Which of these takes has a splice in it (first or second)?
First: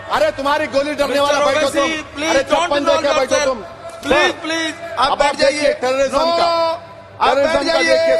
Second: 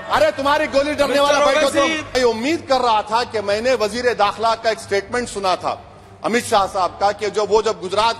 second